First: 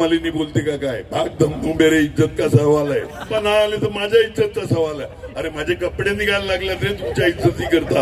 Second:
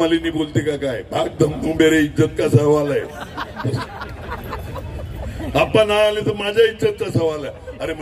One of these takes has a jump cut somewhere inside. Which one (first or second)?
first